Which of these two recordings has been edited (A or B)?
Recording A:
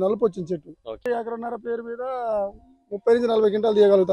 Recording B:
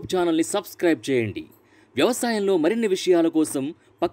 A